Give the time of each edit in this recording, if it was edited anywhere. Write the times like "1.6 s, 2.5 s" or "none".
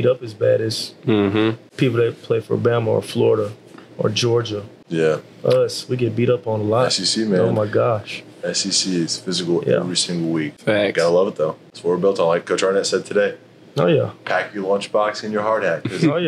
1.7 s, 4.7 s, 10.5 s, 11.7 s